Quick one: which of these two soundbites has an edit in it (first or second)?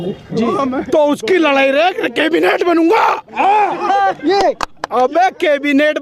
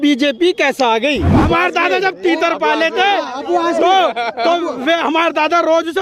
second